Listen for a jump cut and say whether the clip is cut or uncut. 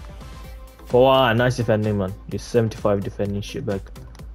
cut